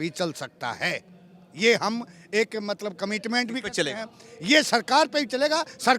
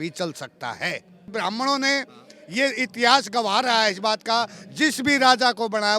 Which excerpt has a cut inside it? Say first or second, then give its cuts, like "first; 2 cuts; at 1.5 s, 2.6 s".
second; 1 cut; at 1.3 s